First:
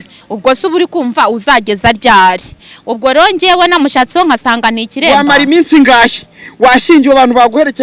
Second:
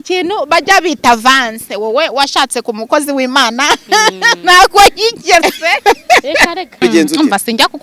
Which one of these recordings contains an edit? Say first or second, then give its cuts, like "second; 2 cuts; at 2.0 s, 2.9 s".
second; 1 cut; at 6.8 s